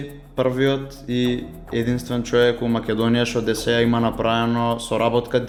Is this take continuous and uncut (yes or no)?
yes